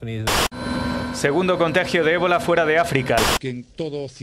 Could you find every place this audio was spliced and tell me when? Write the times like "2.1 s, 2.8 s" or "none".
none